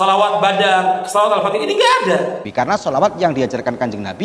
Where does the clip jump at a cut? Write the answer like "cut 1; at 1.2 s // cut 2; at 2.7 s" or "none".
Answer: cut 1; at 2.4 s